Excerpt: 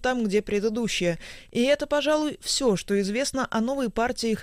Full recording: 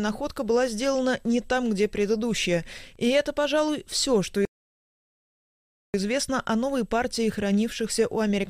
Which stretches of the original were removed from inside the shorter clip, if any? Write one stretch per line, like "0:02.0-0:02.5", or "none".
0:04.5-0:05.9